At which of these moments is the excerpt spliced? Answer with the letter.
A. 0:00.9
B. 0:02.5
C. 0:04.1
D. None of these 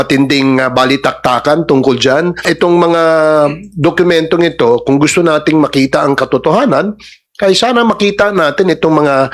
B